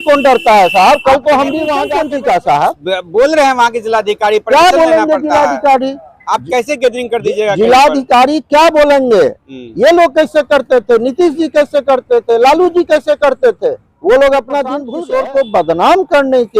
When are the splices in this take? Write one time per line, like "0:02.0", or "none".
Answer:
0:01.8
0:14.9